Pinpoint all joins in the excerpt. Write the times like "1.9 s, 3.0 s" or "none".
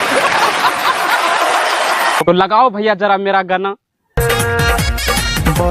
2.2 s